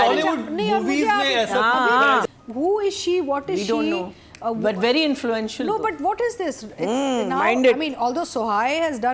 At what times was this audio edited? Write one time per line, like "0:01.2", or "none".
0:02.2